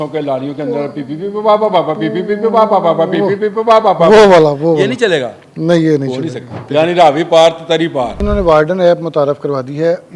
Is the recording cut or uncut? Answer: cut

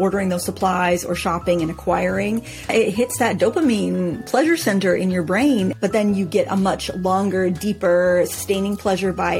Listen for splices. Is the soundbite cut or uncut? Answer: cut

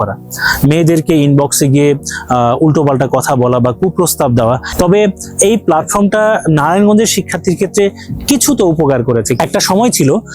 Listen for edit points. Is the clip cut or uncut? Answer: cut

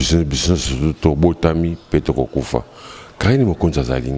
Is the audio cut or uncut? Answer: uncut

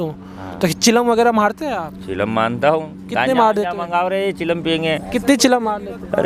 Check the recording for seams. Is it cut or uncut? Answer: uncut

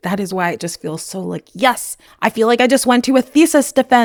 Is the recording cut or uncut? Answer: uncut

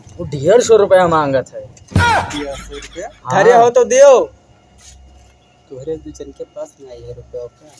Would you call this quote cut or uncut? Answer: uncut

